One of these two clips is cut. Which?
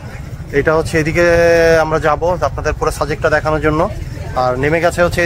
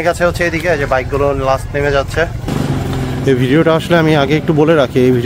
second; 1 cut; at 2.5 s

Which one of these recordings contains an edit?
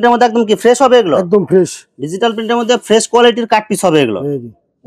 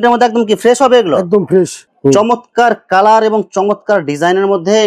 second; 1 cut; at 1.8 s

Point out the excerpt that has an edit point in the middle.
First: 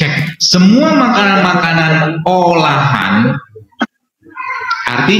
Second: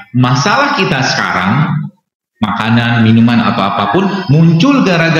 first; 1 cut; at 3.8 s

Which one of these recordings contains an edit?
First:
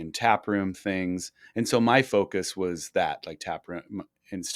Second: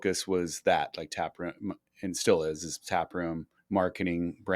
second; 1 cut; at 3.5 s

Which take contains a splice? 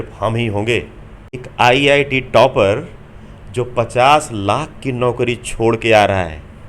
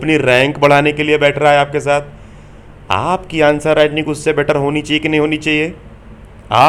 first; 1 cut; at 1.5 s

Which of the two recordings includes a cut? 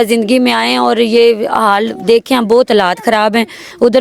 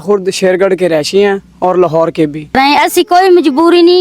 second; 1 cut; at 2.5 s

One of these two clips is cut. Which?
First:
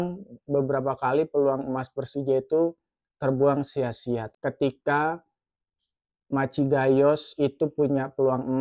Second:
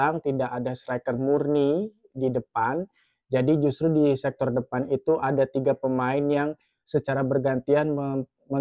first; 1 cut; at 4.3 s

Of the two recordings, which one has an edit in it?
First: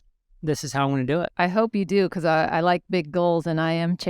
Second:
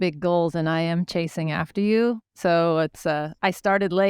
first; 1 cut; at 1.3 s

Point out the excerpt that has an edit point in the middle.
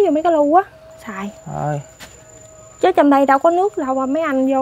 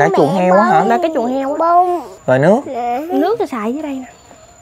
second; 1 cut; at 2.1 s

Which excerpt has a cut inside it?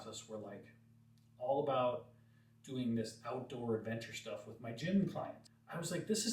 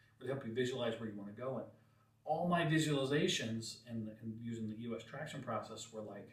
first; 1 cut; at 5.4 s

